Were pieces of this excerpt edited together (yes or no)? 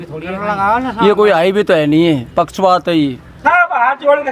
yes